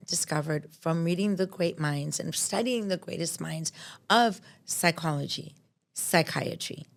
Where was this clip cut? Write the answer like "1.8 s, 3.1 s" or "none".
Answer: none